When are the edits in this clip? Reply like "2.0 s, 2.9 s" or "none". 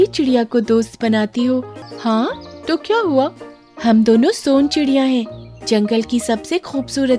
1.7 s